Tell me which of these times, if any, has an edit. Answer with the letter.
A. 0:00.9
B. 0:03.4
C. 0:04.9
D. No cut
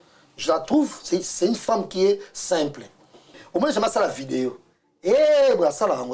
B